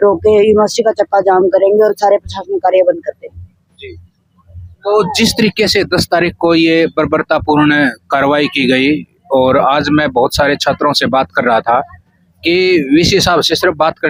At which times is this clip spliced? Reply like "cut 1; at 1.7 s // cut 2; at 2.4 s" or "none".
none